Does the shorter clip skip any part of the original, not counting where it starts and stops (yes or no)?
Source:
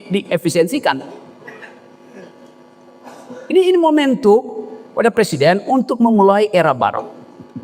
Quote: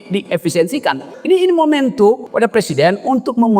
yes